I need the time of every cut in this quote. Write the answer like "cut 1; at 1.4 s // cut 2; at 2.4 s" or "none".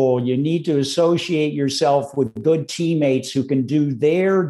cut 1; at 2.3 s